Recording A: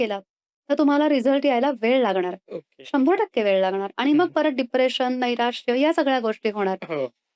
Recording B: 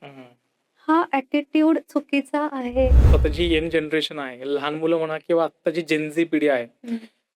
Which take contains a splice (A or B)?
B